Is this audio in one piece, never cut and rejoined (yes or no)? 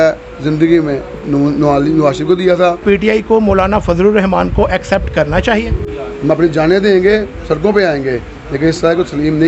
no